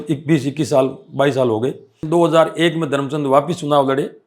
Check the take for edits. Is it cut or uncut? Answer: cut